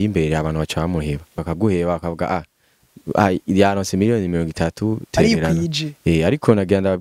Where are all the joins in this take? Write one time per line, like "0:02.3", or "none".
0:01.3